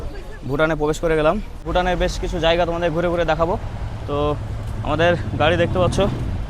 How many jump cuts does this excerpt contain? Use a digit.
1